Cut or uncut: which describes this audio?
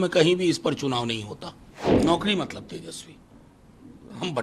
cut